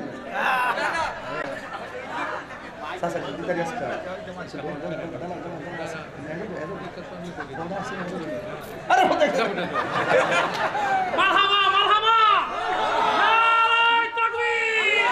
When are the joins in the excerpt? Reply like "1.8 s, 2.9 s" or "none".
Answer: none